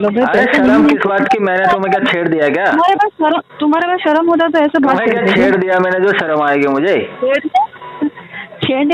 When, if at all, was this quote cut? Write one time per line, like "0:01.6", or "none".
none